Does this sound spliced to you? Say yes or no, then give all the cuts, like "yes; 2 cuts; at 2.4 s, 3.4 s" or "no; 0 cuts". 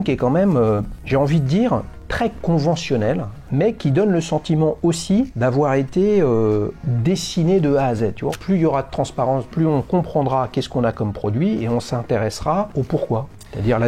yes; 8 cuts; at 0.9 s, 2.0 s, 3.4 s, 5.3 s, 6.7 s, 8.3 s, 9.5 s, 12.7 s